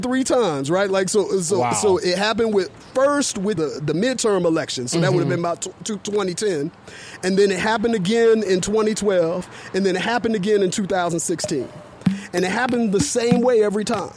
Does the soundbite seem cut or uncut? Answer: cut